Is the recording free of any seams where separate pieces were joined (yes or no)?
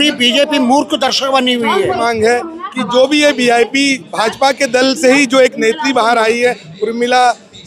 no